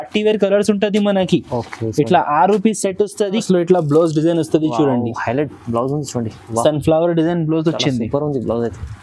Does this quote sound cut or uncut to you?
cut